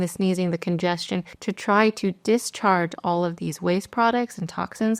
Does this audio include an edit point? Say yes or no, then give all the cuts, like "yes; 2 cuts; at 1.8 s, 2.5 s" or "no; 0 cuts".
no; 0 cuts